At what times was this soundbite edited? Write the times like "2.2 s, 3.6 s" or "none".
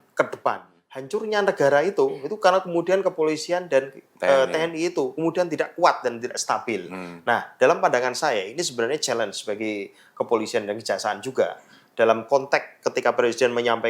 0.9 s